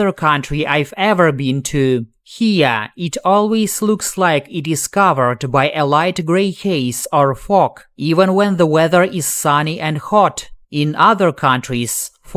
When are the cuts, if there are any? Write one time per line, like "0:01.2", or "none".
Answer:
none